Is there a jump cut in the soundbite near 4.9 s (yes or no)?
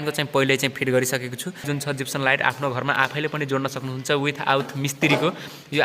no